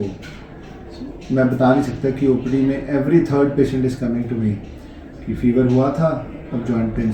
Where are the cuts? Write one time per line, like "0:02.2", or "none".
none